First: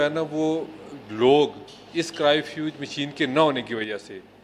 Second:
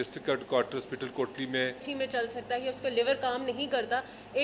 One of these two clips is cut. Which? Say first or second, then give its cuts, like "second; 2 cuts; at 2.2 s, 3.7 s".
second; 1 cut; at 1.9 s